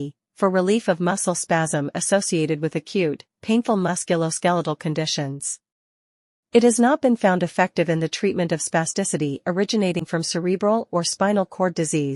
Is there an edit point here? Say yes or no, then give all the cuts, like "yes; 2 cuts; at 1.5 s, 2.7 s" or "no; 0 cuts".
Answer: no; 0 cuts